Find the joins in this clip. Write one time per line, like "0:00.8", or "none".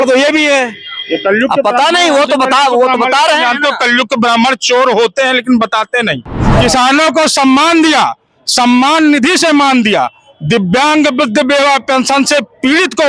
0:06.4